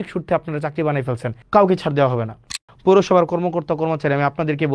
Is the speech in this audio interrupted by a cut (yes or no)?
yes